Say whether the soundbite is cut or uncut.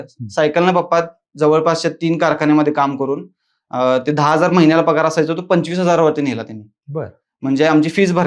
uncut